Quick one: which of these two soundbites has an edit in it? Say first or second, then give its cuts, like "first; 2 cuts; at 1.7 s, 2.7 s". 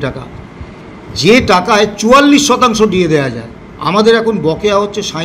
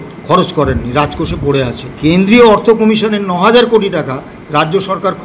second; 1 cut; at 1.8 s